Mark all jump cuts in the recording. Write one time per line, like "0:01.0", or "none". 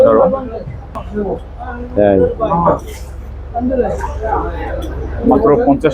0:01.0